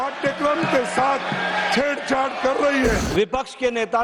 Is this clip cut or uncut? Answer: cut